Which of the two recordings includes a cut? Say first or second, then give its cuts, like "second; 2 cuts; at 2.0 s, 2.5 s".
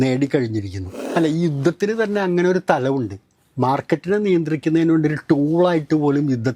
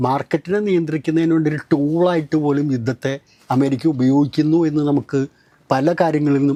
first; 1 cut; at 1.0 s